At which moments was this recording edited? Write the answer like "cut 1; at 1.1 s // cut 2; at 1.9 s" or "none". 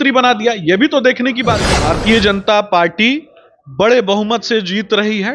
cut 1; at 1.7 s